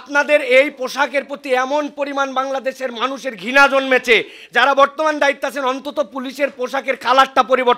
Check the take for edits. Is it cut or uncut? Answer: uncut